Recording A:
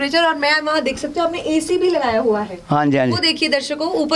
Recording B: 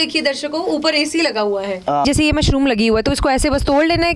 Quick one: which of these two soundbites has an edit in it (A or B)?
B